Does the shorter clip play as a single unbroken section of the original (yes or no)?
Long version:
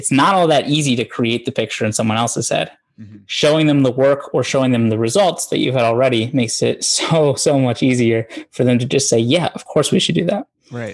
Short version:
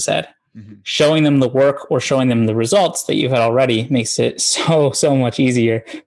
yes